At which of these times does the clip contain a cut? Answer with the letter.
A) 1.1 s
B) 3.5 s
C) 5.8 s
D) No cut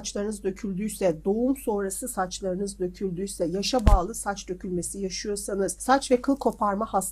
C